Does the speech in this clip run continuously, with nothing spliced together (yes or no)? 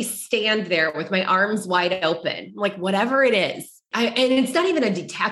no